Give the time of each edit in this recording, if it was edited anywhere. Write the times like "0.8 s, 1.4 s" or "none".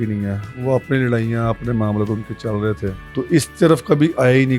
none